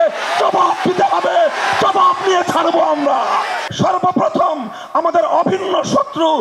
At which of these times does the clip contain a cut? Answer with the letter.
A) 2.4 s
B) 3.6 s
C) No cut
B